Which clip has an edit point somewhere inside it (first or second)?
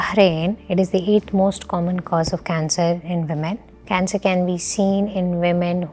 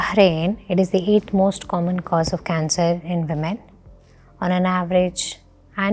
first